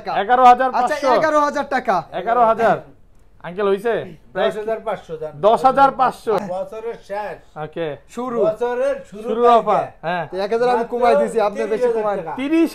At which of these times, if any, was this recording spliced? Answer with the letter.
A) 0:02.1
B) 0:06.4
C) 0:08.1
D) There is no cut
B